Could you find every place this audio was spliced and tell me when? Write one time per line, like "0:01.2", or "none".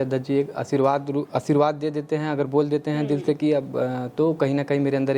none